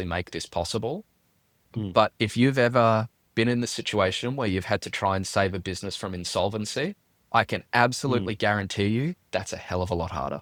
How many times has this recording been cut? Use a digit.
0